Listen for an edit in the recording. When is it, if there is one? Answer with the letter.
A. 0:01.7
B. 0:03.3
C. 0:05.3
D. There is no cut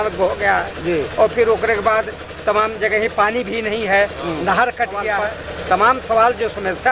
C